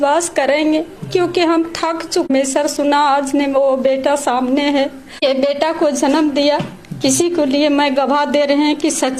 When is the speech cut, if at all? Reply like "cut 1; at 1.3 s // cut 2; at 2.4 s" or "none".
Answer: cut 1; at 2.3 s // cut 2; at 5.2 s